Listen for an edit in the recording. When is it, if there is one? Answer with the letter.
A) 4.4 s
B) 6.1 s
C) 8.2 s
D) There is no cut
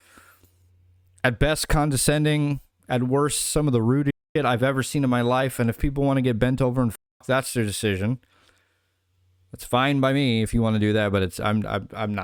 D